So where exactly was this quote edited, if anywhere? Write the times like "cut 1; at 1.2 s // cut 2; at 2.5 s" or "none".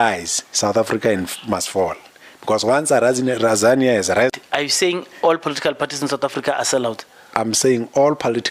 cut 1; at 4.3 s